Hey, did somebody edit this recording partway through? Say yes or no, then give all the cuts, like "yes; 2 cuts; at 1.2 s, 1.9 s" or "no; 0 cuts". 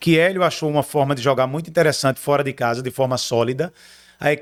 no; 0 cuts